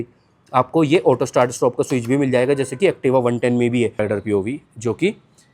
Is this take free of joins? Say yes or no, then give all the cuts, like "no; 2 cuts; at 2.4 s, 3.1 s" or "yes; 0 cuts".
no; 1 cut; at 4.0 s